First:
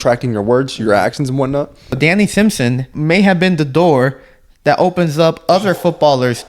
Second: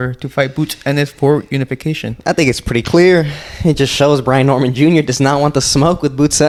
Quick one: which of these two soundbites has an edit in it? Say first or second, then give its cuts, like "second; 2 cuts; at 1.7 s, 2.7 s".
first; 2 cuts; at 2.0 s, 2.9 s